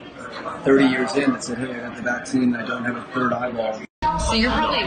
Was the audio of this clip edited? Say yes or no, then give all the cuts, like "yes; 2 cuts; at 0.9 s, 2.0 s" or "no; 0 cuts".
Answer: no; 0 cuts